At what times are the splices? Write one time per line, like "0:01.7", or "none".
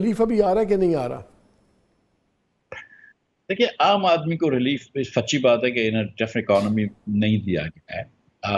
none